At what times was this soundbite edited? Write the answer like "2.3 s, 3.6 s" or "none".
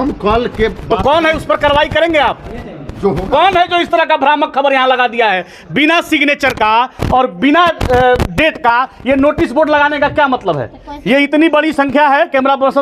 none